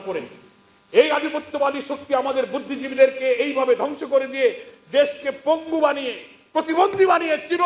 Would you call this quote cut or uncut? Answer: uncut